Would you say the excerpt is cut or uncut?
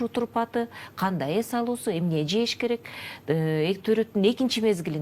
uncut